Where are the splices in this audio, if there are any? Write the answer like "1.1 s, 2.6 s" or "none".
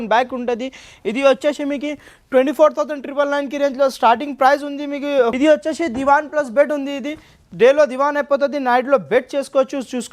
5.3 s